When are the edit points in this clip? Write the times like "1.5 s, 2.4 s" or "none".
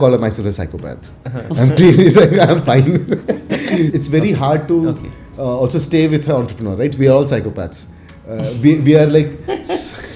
3.9 s